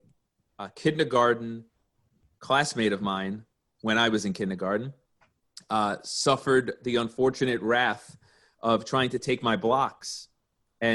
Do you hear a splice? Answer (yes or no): no